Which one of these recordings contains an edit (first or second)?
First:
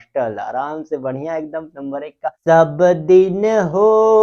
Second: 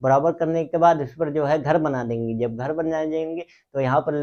first